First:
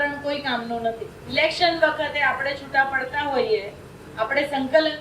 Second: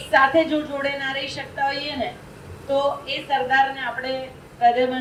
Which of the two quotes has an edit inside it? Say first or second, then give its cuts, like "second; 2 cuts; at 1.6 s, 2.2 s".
first; 1 cut; at 1.2 s